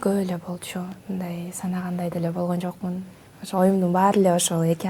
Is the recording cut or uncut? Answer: uncut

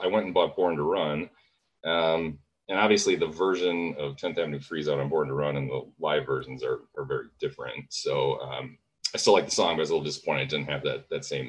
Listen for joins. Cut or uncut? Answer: uncut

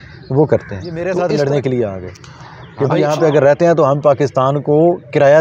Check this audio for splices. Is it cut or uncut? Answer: cut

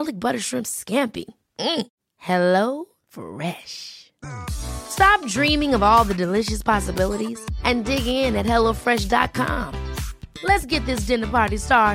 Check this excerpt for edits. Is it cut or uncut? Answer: uncut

